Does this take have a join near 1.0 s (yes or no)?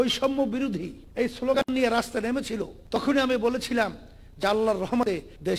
yes